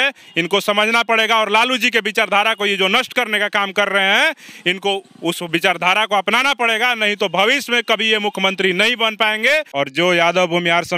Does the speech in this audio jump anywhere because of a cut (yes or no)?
yes